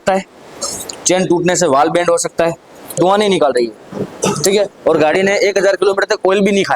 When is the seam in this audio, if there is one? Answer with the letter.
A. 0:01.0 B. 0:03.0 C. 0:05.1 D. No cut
B